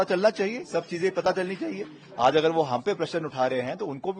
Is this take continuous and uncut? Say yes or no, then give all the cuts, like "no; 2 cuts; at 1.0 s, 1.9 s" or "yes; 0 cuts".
yes; 0 cuts